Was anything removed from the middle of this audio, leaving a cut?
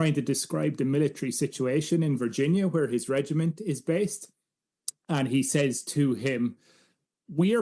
no; 0 cuts

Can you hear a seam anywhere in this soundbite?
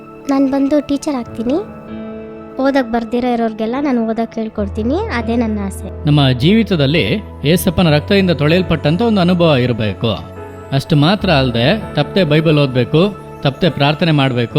yes; 1 cut; at 5.9 s

